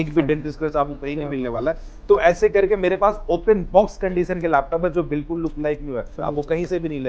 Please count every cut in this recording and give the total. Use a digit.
1